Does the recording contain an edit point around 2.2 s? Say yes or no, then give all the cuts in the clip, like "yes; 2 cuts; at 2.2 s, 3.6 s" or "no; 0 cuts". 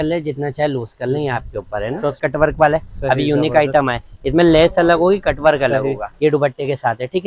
yes; 2 cuts; at 2.2 s, 6.1 s